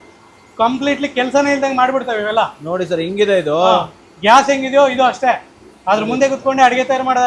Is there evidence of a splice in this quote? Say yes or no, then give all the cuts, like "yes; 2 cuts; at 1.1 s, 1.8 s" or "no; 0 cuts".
no; 0 cuts